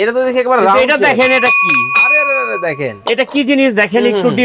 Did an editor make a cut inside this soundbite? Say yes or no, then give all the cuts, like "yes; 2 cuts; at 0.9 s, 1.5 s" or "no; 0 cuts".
no; 0 cuts